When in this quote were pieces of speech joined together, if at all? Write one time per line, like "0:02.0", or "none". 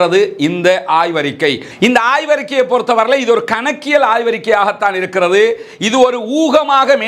none